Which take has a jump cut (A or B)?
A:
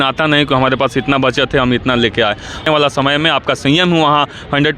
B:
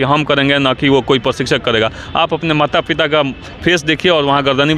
A